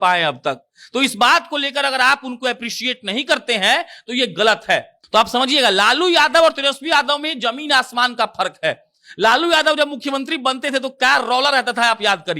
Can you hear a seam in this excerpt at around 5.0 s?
yes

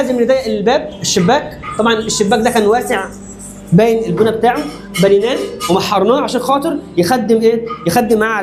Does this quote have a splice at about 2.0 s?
no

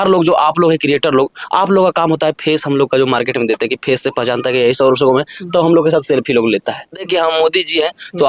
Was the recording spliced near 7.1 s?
yes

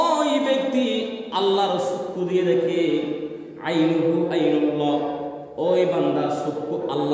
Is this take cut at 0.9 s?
no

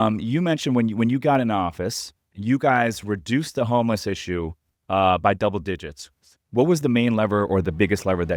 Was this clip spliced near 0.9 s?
no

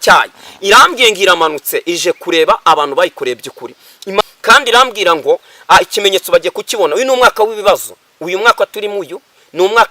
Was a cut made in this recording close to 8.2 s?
no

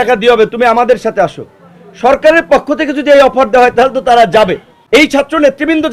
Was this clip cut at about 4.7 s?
yes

